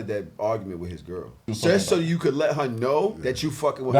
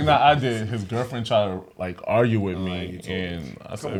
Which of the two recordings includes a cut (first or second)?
first